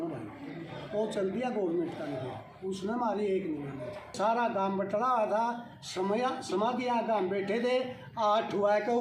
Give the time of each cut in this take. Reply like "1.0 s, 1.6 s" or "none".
4.1 s